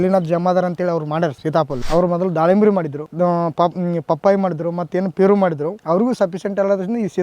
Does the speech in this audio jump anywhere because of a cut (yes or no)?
yes